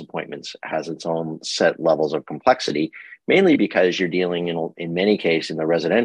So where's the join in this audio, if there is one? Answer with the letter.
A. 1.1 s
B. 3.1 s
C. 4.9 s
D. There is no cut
D